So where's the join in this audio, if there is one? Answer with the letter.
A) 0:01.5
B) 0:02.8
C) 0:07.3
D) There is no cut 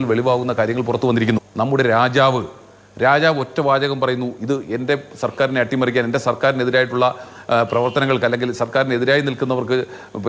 A